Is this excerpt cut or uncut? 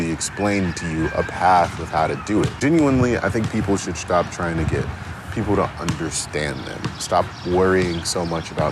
cut